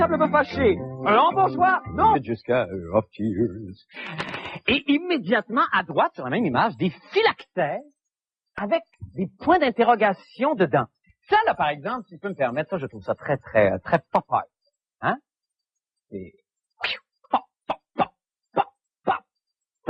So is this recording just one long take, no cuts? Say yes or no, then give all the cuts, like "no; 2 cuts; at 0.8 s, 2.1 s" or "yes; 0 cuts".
yes; 0 cuts